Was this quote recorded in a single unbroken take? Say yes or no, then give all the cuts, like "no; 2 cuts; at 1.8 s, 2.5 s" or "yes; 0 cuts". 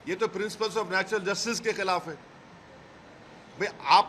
yes; 0 cuts